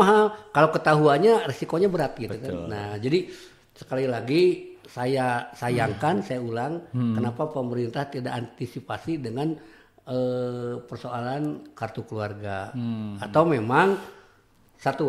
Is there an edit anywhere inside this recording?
no; 0 cuts

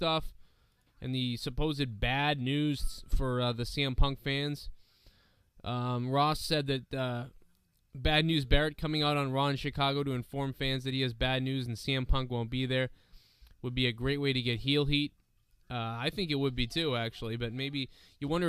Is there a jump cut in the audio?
yes; 1 cut; at 6.4 s

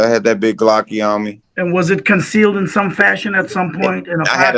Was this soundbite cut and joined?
no; 0 cuts

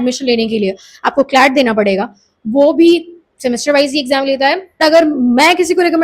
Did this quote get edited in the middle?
yes; 1 cut; at 4.7 s

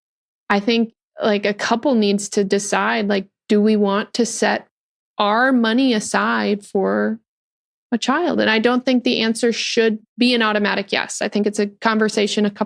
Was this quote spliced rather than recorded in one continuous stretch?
yes; 1 cut; at 10.1 s

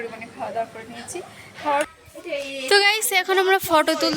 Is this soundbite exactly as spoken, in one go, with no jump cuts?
no; 1 cut; at 1.9 s

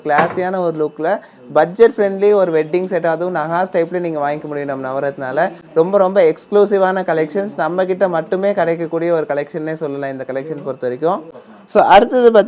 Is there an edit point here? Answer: no; 0 cuts

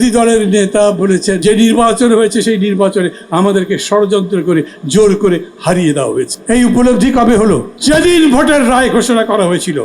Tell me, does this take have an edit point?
yes; 3 cuts; at 1.4 s, 6.4 s, 7.7 s

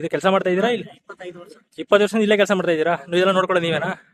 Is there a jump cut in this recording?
no; 0 cuts

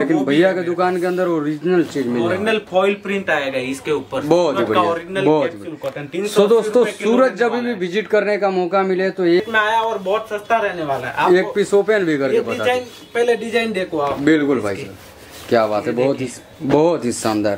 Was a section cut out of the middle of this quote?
yes; 1 cut; at 9.4 s

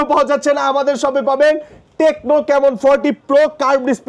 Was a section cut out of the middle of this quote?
no; 0 cuts

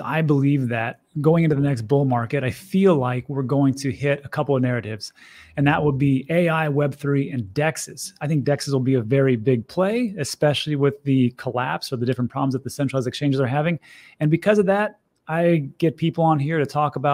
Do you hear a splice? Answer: no; 0 cuts

